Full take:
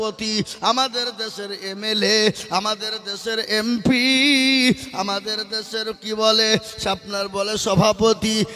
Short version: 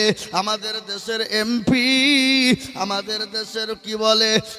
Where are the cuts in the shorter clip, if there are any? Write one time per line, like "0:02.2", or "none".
none